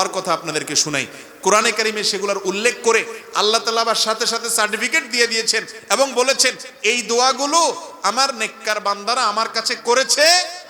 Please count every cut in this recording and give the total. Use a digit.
0